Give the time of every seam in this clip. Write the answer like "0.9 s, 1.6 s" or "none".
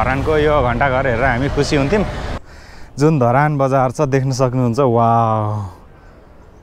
2.4 s